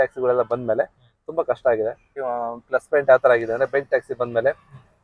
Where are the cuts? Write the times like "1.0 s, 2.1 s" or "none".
2.1 s